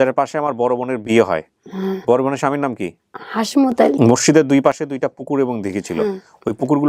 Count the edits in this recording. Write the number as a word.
one